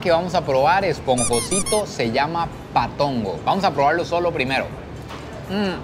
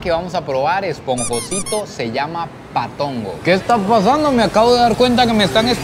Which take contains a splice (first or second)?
second